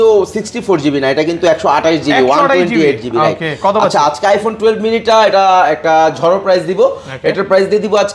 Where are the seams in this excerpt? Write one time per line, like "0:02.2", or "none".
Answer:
none